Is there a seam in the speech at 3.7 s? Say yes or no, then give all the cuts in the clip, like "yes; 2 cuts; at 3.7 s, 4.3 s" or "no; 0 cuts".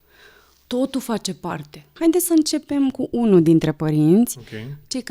no; 1 cut; at 2.0 s